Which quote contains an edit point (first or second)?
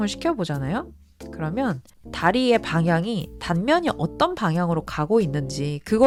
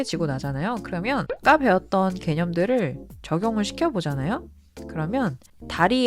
second